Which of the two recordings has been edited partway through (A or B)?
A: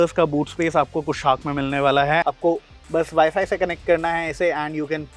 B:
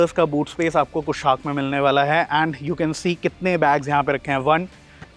A